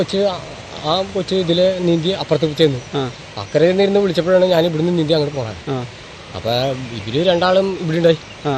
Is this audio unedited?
no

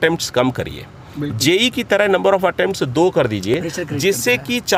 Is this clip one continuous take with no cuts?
yes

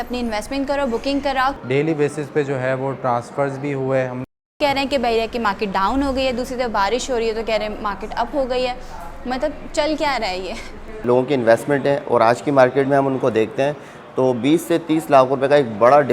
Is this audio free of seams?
no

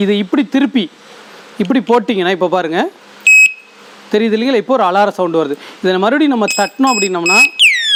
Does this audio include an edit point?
no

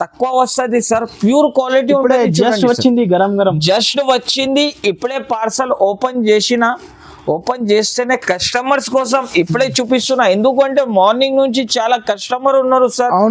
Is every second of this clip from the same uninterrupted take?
yes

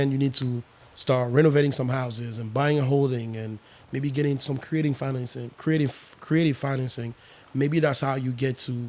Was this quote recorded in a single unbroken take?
yes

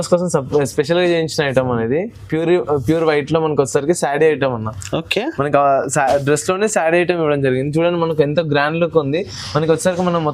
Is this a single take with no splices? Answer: yes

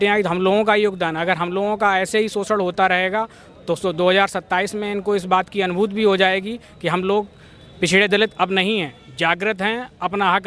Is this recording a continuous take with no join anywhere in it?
yes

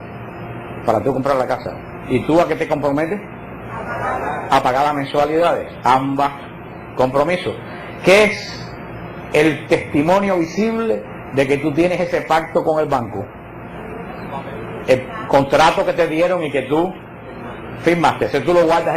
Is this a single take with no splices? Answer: no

